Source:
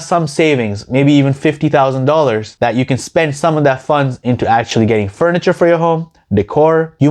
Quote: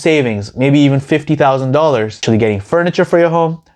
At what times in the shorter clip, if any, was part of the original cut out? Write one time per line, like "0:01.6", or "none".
0:02.2